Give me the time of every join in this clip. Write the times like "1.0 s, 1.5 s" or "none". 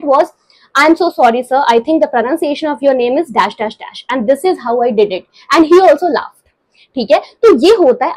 none